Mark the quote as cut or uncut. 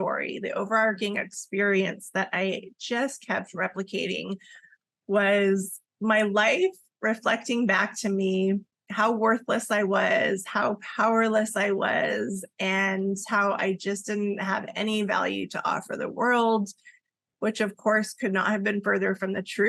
uncut